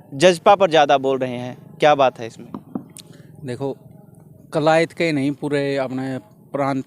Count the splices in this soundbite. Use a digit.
0